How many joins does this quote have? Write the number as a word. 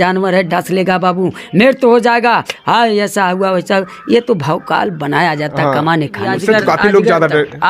one